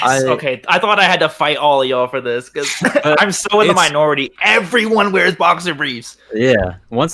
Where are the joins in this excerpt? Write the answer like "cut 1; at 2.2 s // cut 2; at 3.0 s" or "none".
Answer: none